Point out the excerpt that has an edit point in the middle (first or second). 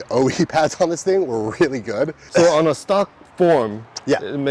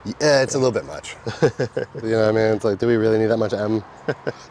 first